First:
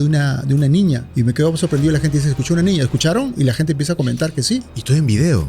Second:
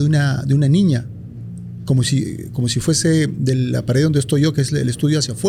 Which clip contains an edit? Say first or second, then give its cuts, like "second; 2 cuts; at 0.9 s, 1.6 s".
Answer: first; 1 cut; at 1.1 s